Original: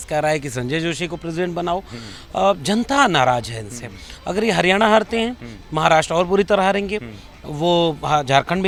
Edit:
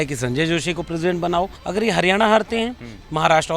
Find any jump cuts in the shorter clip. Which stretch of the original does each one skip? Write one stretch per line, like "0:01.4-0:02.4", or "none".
0:01.9-0:04.2